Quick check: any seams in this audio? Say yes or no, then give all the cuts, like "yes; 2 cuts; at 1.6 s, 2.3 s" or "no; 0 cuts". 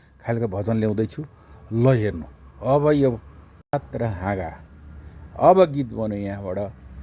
yes; 1 cut; at 3.7 s